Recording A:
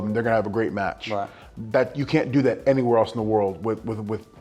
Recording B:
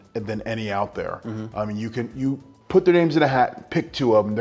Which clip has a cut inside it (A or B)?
B